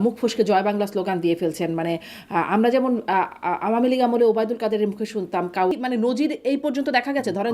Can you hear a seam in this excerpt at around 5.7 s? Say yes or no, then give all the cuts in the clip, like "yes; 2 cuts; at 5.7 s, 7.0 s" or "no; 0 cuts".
yes; 1 cut; at 5.7 s